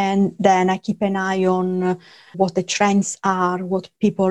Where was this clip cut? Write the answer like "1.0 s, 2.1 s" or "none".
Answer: 2.3 s